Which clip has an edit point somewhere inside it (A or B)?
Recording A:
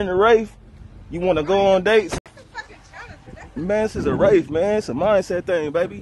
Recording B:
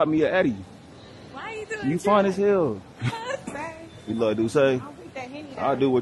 B